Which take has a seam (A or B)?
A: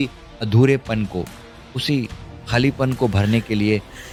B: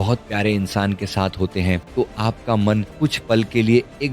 B